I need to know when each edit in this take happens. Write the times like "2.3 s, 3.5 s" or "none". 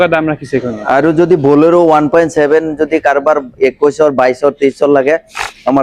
none